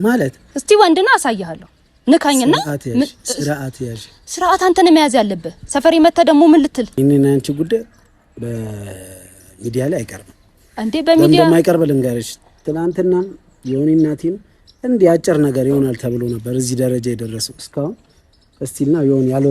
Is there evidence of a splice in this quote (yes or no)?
yes